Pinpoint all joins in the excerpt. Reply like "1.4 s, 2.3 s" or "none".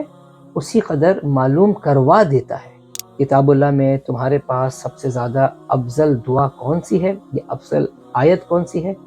3.0 s